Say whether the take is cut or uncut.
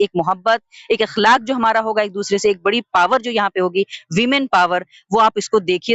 uncut